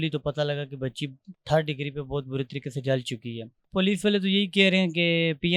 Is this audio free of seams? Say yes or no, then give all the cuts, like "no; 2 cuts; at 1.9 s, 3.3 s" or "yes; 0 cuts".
no; 1 cut; at 3.6 s